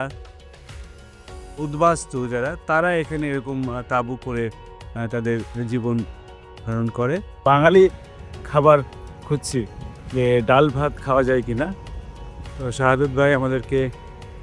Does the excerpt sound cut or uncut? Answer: cut